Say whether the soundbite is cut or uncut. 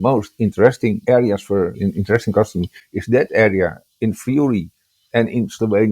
cut